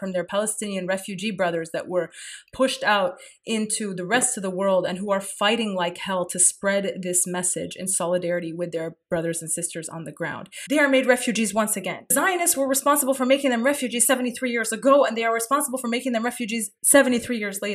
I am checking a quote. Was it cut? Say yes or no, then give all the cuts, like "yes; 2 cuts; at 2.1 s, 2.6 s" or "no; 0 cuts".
yes; 3 cuts; at 10.5 s, 12.1 s, 16.7 s